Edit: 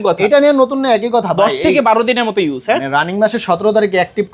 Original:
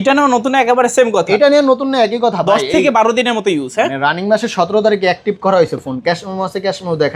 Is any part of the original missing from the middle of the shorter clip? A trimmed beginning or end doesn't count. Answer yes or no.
no